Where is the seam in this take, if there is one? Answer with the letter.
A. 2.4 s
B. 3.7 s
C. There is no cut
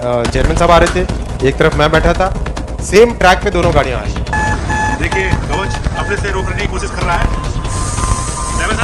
C